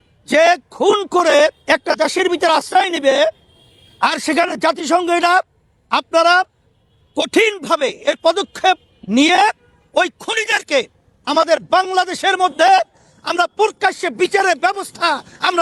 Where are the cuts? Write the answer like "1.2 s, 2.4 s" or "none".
none